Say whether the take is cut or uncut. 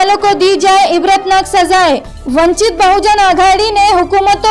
uncut